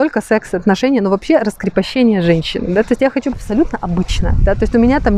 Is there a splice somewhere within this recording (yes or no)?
yes